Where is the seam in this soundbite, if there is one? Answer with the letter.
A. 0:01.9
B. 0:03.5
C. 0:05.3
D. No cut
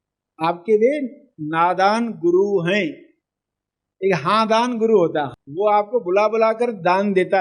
C